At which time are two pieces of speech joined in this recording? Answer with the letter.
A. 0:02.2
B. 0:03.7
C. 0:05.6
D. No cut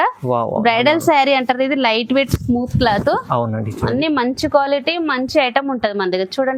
D